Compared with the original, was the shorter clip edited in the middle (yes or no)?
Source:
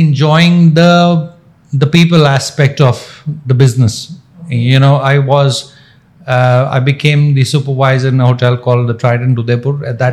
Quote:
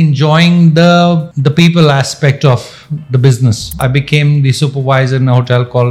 yes